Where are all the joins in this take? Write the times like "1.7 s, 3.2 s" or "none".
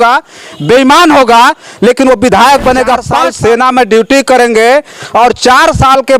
3.1 s